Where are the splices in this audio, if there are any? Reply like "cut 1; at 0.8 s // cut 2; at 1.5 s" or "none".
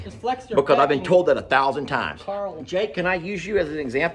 cut 1; at 2.6 s